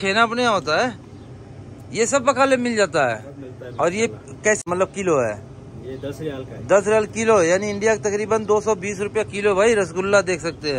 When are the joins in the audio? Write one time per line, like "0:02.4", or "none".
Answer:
none